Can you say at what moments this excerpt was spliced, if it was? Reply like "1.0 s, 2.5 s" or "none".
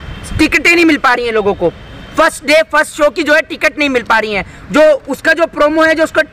none